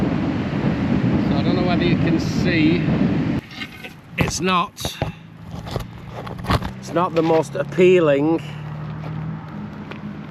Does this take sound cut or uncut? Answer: cut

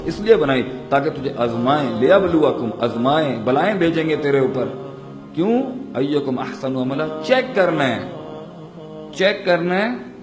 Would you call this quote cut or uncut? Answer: uncut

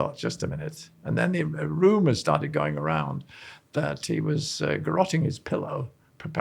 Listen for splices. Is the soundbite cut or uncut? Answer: uncut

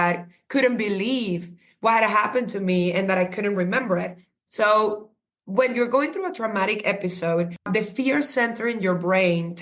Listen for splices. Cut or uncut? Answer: cut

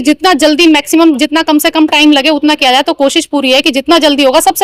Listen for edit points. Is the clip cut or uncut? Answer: uncut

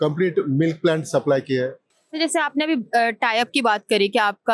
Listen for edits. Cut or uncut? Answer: cut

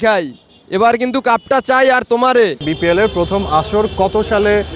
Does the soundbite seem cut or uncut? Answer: cut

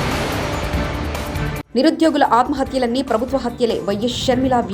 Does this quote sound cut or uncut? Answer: cut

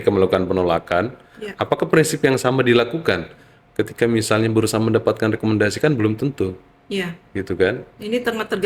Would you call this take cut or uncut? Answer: uncut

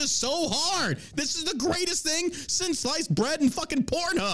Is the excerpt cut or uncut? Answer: cut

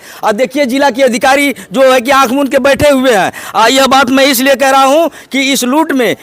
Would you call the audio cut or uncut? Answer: uncut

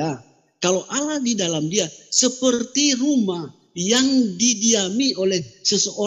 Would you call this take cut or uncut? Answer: uncut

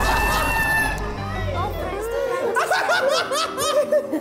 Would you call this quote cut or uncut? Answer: uncut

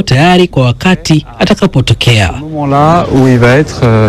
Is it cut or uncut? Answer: cut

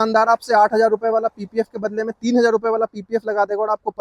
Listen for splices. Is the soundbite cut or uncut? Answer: uncut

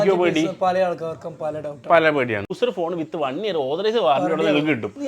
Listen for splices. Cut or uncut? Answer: cut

